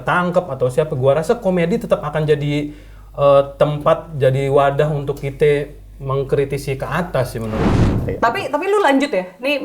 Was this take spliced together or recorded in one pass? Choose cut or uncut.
cut